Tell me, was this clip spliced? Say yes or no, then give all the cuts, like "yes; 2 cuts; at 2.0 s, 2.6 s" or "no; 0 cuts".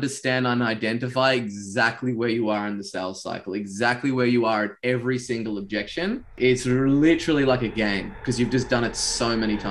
yes; 1 cut; at 6.3 s